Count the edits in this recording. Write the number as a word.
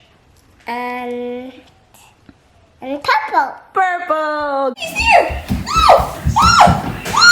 one